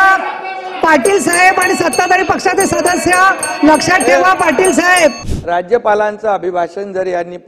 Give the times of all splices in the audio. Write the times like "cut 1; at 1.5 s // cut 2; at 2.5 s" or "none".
cut 1; at 5.3 s